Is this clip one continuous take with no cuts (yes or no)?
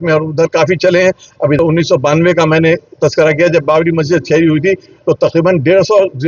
no